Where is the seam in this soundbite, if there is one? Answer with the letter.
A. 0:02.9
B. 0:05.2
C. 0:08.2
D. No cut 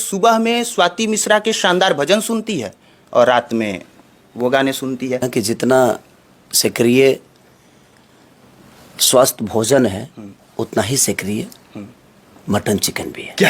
B